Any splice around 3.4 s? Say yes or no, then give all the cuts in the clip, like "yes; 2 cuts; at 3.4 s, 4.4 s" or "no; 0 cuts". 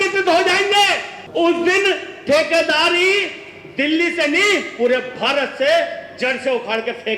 no; 1 cut; at 1.2 s